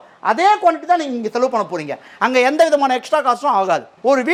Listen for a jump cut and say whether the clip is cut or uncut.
uncut